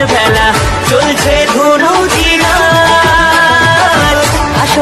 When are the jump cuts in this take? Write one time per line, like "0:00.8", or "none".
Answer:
none

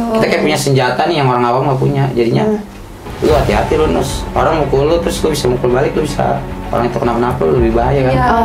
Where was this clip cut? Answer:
none

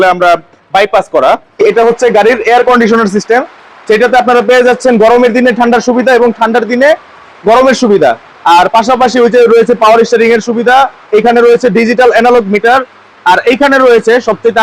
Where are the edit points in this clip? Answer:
0:01.6

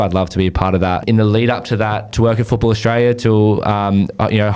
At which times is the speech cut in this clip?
0:01.0
0:02.1

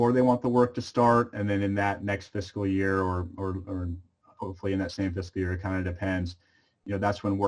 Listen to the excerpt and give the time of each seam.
none

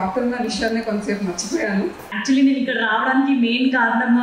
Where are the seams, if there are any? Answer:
0:02.0

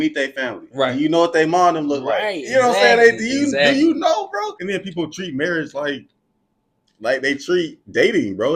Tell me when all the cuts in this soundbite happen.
0:04.6

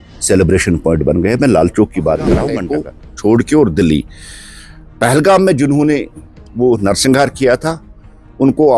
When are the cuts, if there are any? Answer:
0:02.6

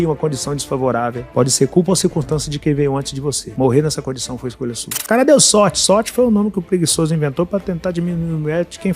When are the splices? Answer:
0:04.9

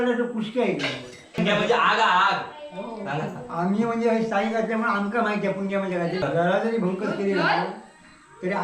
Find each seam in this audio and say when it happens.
0:01.4
0:06.2

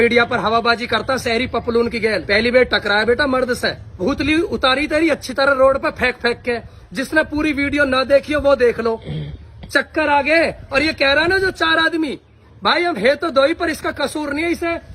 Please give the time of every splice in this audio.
0:04.0

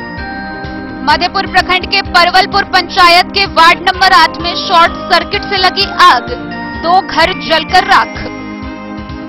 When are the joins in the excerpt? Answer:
0:01.0

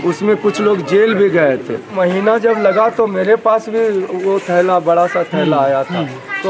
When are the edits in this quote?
0:01.9

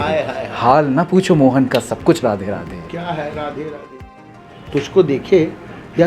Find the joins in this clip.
0:03.9

